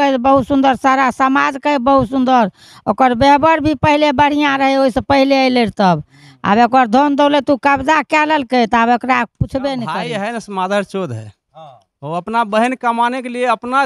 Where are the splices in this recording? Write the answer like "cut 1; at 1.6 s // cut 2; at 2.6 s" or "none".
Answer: cut 1; at 10.0 s

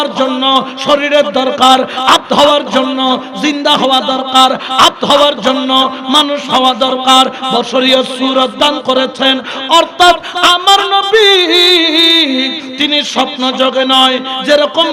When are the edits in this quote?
none

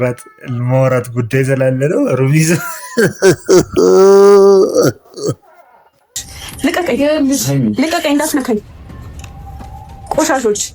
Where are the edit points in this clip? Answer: cut 1; at 6.1 s

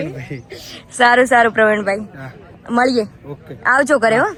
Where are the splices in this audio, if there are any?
none

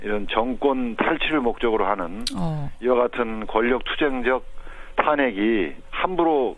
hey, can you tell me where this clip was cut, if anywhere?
none

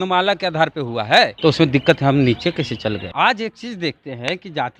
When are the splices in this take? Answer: cut 1; at 1.3 s // cut 2; at 3.1 s

